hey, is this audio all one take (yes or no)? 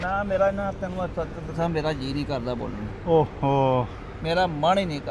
yes